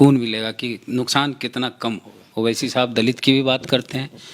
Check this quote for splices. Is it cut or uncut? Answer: cut